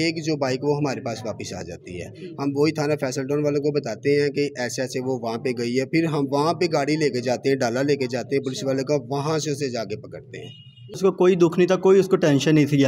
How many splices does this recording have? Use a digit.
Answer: 1